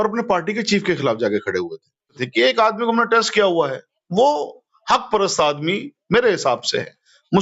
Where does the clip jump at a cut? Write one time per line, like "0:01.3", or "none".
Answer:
0:02.2